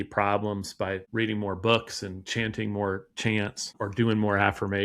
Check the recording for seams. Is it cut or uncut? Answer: cut